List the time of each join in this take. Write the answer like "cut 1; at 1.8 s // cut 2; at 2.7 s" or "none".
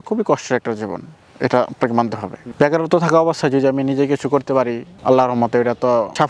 none